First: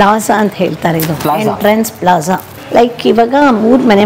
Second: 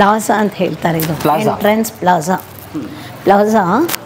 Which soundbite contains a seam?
first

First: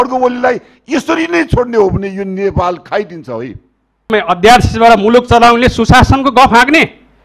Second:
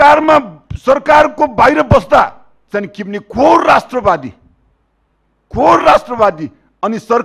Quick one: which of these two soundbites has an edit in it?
first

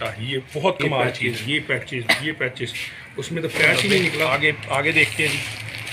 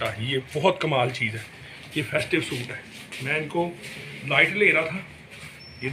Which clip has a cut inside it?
first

